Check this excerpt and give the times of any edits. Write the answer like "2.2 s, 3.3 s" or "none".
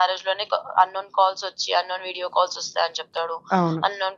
none

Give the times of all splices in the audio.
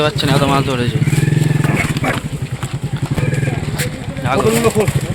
none

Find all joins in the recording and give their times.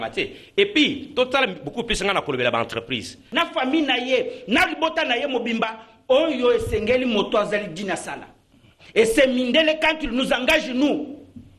3.2 s

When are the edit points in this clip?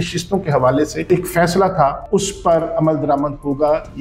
1.1 s, 2.0 s

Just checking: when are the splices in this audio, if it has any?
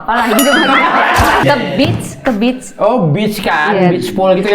1.4 s

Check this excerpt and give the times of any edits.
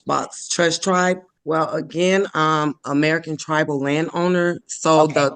1.3 s

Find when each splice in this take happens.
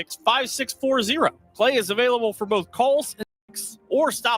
3.4 s

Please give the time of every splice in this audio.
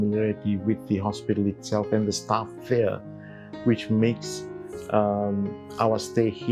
none

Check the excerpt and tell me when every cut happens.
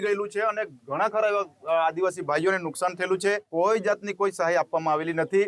3.4 s

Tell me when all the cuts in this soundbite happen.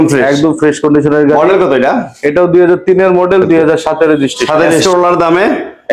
4.8 s

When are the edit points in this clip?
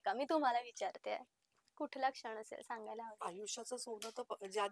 none

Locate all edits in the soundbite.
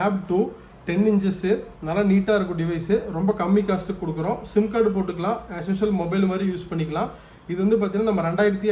none

